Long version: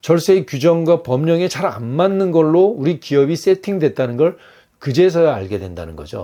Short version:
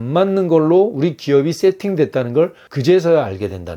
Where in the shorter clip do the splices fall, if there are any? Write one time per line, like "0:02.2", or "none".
0:02.7